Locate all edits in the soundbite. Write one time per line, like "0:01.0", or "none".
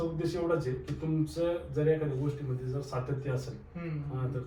none